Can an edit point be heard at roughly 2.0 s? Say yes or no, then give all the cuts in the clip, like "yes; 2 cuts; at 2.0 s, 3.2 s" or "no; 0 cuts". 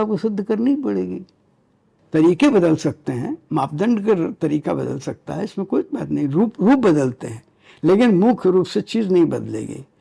yes; 1 cut; at 2.0 s